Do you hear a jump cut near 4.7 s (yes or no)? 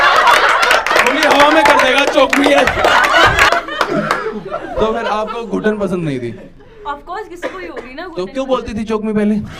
yes